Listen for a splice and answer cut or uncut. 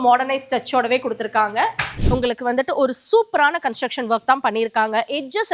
cut